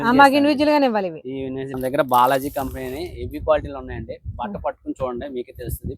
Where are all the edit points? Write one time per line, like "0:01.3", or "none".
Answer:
0:02.1